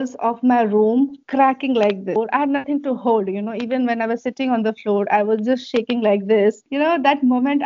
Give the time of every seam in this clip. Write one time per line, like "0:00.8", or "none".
0:02.2
0:06.6